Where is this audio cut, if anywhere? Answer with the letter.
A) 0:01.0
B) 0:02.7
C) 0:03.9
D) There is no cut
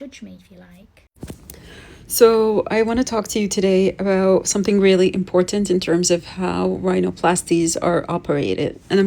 A